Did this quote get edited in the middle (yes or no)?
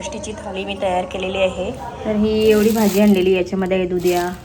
yes